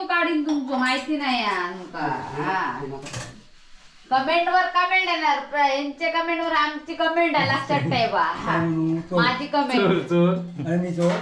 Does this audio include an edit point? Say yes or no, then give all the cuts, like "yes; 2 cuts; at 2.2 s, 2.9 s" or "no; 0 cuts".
no; 0 cuts